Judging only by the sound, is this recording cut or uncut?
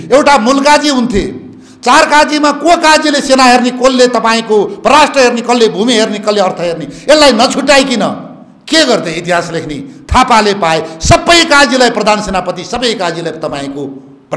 uncut